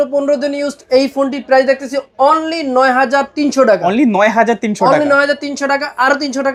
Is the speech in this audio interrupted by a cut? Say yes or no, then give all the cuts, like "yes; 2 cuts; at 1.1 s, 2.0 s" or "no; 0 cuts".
no; 0 cuts